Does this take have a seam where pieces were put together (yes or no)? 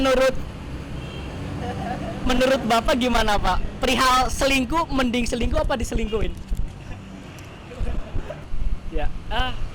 no